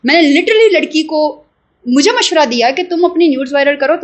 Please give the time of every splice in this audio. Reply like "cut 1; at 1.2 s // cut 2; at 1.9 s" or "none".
none